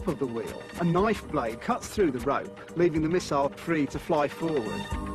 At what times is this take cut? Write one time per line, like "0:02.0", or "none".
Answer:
0:02.1